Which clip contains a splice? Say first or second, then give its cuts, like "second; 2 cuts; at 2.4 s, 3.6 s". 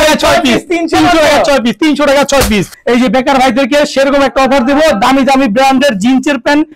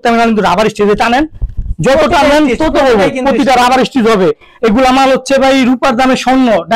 first; 1 cut; at 2.7 s